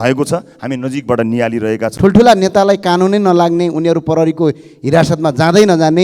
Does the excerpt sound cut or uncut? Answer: cut